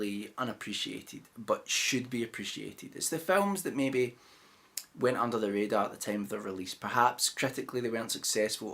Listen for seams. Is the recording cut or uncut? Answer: cut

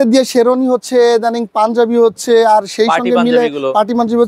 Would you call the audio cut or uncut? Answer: uncut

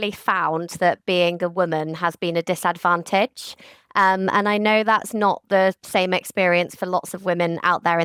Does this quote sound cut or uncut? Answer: uncut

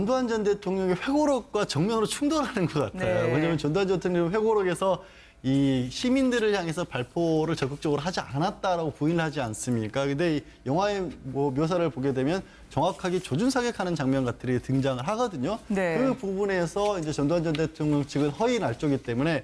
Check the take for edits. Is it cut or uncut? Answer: uncut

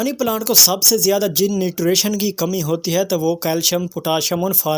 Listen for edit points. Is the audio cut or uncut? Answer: uncut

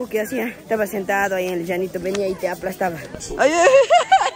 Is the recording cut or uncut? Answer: cut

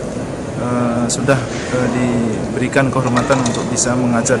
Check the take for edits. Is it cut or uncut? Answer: uncut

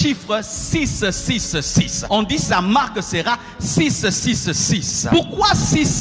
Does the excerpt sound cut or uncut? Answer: cut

